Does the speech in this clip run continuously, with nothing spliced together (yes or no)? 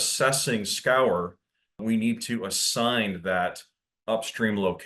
no